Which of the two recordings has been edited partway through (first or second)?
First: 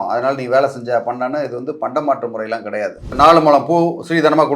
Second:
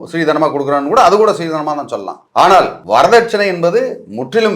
first